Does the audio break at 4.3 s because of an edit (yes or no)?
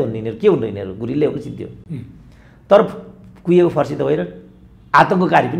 no